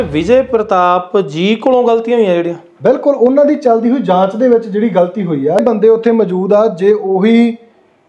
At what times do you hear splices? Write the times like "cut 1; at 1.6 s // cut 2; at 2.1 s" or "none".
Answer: cut 1; at 5.6 s